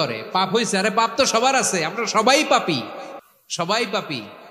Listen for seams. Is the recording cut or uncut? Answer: uncut